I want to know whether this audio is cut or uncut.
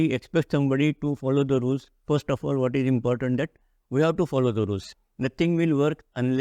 cut